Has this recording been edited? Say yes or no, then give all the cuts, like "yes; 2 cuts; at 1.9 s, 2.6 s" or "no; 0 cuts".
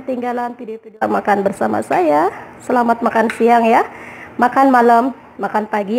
yes; 1 cut; at 0.9 s